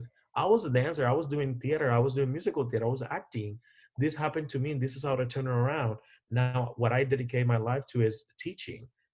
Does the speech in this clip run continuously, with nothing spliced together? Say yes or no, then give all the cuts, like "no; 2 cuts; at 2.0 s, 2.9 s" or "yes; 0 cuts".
yes; 0 cuts